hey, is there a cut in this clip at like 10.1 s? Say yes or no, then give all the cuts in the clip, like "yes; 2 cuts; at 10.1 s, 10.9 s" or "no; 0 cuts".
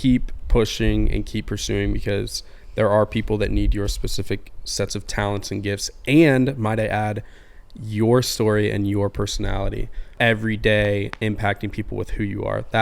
yes; 1 cut; at 10.1 s